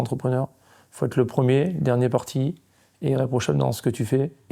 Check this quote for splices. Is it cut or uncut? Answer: uncut